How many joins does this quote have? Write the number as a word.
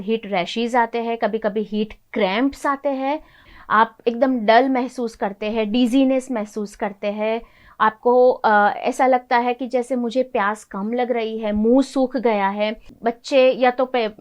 two